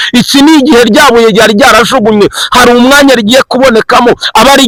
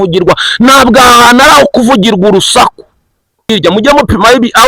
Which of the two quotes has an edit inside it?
second; 1 cut; at 3.5 s

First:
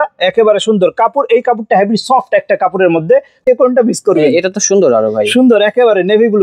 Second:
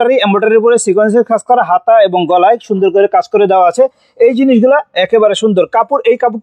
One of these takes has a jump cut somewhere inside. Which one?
first; 1 cut; at 3.4 s

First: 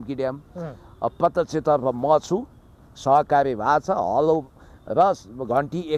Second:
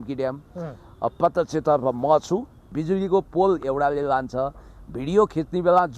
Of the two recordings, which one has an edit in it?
second; 1 cut; at 2.7 s

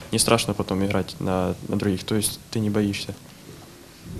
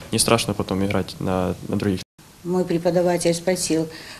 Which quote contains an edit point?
second; 1 cut; at 2.0 s

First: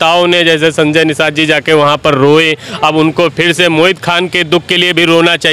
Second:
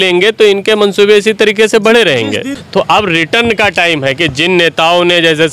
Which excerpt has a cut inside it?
second; 1 cut; at 2.5 s

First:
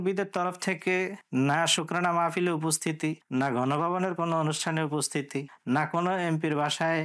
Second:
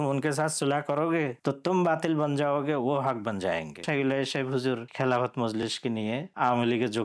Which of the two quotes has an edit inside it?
second; 4 cuts; at 1.4 s, 3.8 s, 4.9 s, 5.8 s

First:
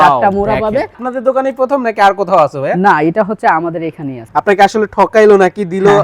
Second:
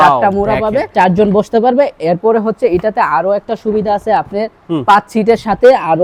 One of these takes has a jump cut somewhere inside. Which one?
first; 2 cuts; at 0.9 s, 4.2 s

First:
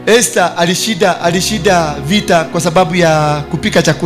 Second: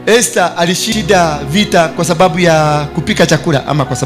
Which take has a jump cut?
second; 1 cut; at 0.9 s

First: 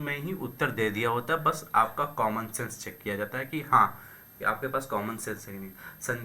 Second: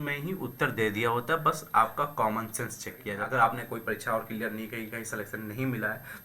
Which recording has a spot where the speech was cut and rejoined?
second; 1 cut; at 3.2 s

